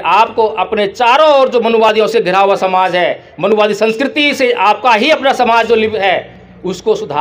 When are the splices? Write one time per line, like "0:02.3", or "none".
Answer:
0:06.0